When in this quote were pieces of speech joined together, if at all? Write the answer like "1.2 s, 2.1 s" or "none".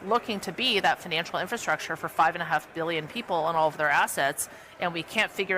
none